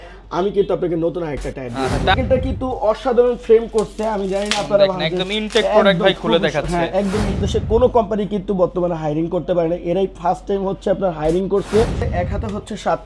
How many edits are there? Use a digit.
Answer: 3